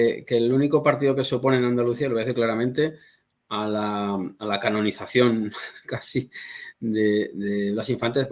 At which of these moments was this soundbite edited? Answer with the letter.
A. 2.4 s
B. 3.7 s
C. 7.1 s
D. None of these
D